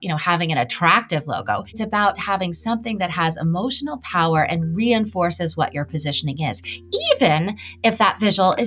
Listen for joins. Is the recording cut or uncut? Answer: cut